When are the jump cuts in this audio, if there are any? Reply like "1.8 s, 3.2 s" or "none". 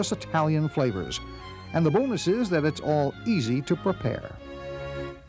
4.2 s